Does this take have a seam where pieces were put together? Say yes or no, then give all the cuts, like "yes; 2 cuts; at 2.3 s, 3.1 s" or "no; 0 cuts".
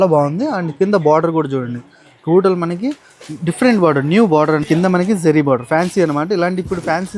yes; 1 cut; at 4.7 s